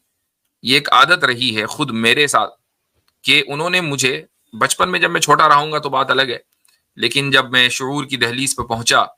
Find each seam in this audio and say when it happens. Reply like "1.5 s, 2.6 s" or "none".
none